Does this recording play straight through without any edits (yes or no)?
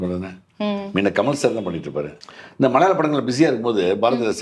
no